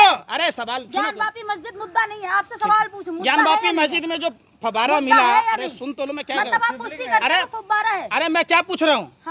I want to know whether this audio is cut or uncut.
uncut